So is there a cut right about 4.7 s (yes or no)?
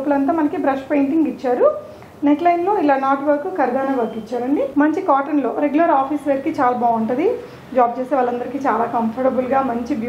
yes